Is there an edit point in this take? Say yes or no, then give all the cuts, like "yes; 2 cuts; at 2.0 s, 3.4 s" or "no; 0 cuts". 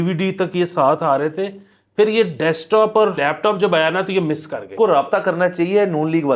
yes; 2 cuts; at 3.2 s, 4.7 s